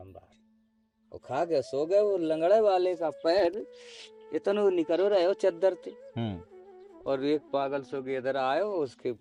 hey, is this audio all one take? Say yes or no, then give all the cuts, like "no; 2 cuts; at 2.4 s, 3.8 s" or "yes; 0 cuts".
yes; 0 cuts